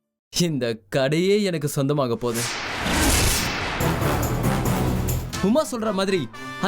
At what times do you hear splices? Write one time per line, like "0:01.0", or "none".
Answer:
0:05.2